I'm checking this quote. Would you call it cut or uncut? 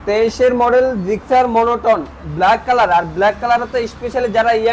uncut